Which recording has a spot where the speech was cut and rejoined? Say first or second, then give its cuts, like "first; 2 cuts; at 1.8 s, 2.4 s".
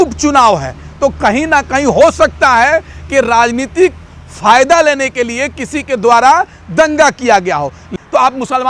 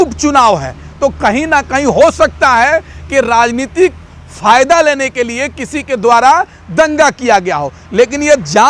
first; 1 cut; at 7.8 s